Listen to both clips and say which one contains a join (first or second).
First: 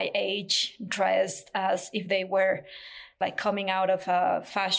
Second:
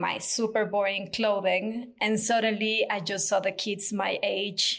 first